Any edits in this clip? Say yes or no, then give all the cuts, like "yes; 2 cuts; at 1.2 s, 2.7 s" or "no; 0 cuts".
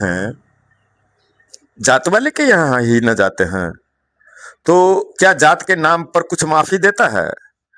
no; 0 cuts